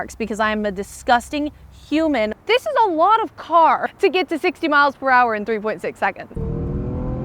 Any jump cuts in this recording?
yes; 3 cuts; at 2.3 s, 3.9 s, 6.4 s

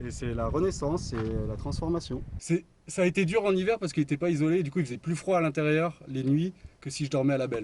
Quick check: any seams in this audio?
yes; 1 cut; at 2.3 s

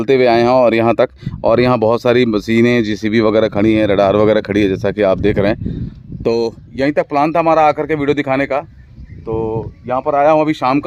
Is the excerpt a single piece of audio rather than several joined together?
yes; 0 cuts

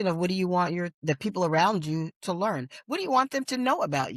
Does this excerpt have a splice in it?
no; 0 cuts

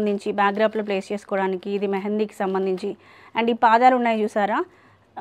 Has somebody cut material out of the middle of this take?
no; 0 cuts

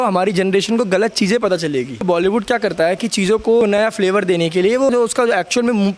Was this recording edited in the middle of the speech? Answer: yes; 3 cuts; at 2.0 s, 3.6 s, 4.9 s

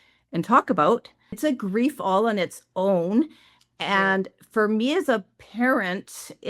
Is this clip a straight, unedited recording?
no; 1 cut; at 1.4 s

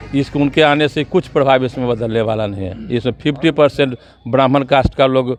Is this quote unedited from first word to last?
yes; 0 cuts

